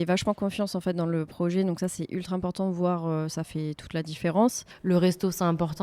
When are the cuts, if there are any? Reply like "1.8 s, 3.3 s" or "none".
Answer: 4.6 s